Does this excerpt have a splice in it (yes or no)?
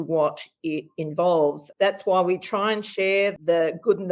yes